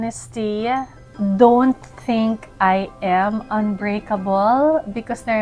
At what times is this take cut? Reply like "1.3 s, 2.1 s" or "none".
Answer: 1.0 s